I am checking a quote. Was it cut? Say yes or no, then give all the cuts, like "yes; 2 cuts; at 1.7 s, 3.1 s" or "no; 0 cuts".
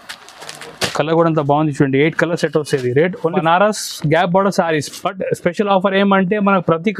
yes; 1 cut; at 3.4 s